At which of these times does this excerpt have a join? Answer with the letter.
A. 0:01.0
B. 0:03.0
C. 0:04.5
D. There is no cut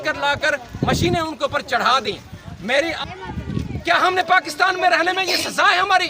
B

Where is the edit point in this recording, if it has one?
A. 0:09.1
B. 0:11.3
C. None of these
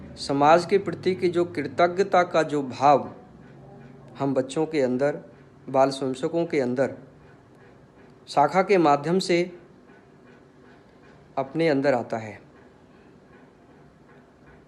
C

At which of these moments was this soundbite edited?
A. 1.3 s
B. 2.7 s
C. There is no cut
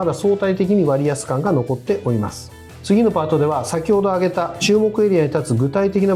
C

